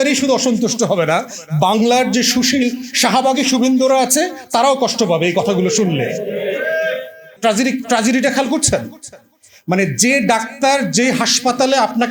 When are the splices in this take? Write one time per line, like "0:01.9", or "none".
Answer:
0:07.3

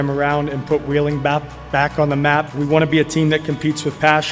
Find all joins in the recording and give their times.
0:02.5

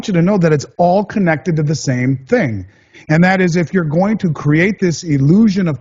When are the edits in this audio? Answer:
none

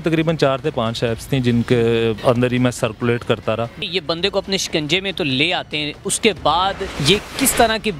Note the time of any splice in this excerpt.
0:02.2
0:03.9
0:06.9

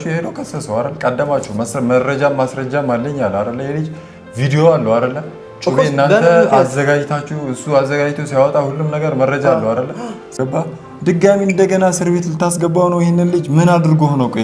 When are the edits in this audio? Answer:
0:10.4

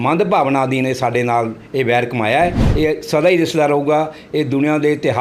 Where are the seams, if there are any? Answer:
none

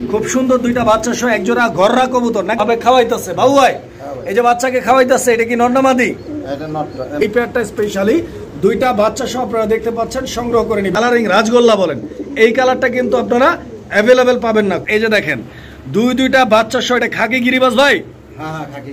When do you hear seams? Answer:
0:02.6
0:07.1
0:10.9
0:14.5

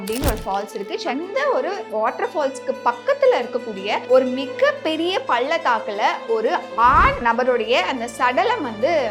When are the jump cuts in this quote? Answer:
0:01.1
0:04.0
0:07.2

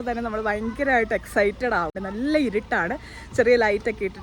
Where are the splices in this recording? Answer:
0:02.0

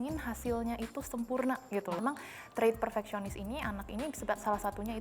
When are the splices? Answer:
0:02.0

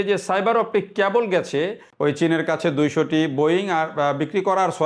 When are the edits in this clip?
0:01.8

